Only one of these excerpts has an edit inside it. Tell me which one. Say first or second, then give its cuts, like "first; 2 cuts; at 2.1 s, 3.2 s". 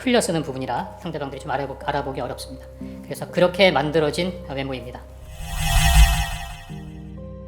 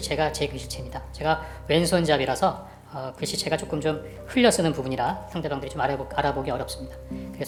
first; 2 cuts; at 5.2 s, 6.6 s